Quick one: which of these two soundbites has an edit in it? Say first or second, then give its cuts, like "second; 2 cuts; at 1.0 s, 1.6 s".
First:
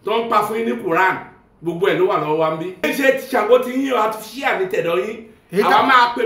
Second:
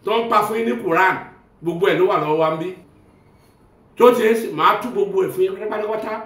first; 1 cut; at 2.9 s